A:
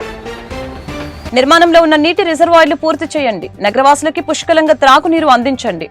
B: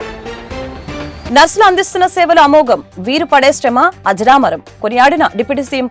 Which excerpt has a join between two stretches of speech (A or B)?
A